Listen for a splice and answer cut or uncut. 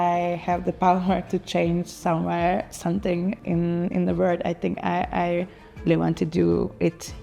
uncut